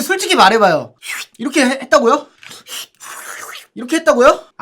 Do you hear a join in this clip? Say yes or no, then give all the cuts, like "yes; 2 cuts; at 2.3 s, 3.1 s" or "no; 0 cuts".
yes; 1 cut; at 1.0 s